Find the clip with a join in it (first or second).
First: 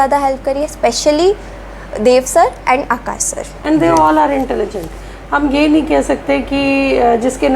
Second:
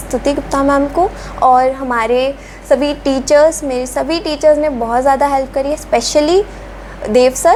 first